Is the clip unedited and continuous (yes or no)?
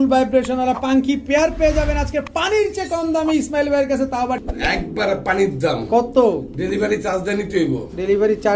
no